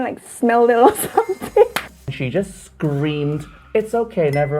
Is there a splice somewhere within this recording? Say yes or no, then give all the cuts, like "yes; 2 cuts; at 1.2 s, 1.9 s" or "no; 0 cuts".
yes; 1 cut; at 1.9 s